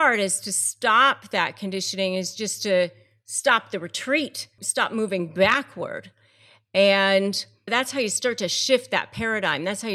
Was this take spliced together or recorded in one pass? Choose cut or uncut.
cut